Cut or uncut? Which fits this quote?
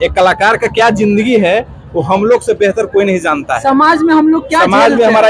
uncut